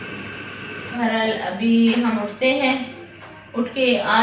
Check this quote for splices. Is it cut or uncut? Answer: cut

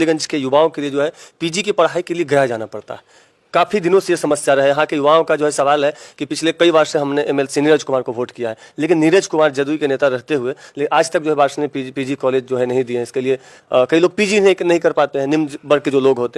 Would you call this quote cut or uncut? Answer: uncut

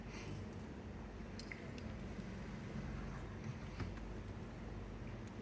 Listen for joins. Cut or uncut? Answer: uncut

